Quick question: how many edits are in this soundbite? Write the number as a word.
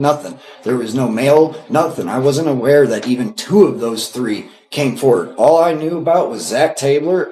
zero